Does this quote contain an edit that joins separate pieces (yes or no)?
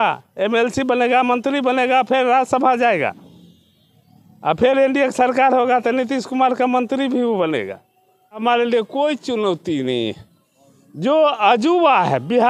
yes